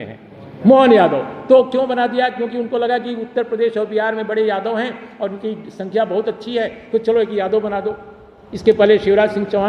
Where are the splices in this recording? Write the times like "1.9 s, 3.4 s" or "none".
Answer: none